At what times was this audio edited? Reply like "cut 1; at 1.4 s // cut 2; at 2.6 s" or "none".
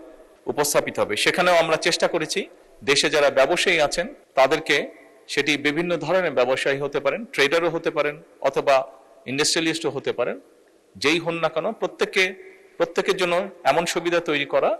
none